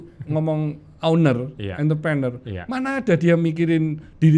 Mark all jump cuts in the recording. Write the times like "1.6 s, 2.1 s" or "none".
none